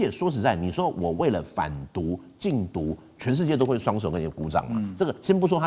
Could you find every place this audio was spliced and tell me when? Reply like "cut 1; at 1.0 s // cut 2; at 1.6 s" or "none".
none